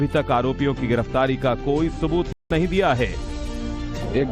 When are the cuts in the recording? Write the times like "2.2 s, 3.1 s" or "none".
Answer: none